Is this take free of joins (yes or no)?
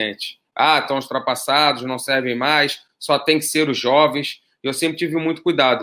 yes